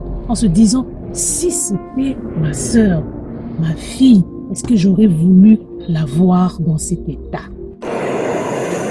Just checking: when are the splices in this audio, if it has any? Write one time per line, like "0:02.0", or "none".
0:07.7

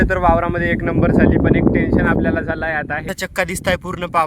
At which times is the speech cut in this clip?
0:03.1

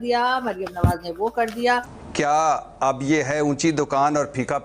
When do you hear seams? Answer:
0:02.0

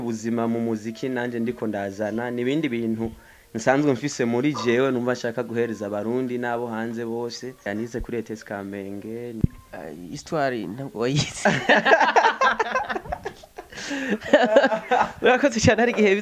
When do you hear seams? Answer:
0:07.7
0:09.4

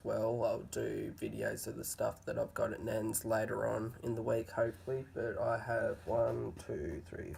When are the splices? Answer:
none

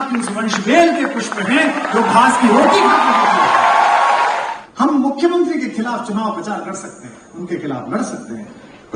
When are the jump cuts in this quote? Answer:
0:04.5

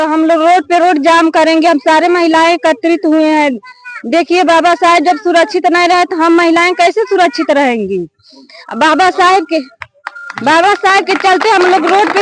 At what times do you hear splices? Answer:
none

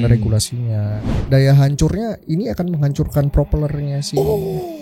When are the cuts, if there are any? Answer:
0:01.2

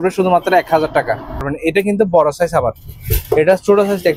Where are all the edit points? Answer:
0:01.5

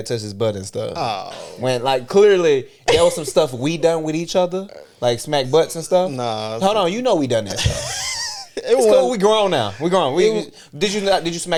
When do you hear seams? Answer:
none

